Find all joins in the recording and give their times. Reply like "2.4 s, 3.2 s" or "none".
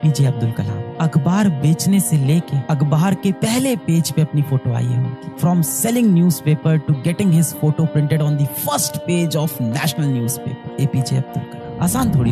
none